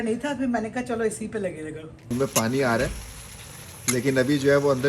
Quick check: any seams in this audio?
yes; 1 cut; at 2.0 s

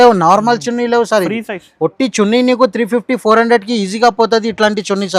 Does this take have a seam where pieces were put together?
no; 0 cuts

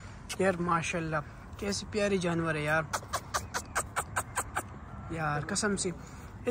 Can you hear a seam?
no; 0 cuts

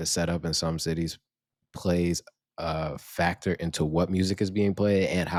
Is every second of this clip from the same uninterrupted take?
yes; 0 cuts

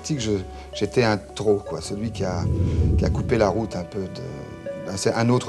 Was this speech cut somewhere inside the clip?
no; 0 cuts

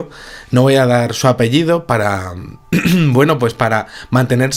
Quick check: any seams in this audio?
no; 0 cuts

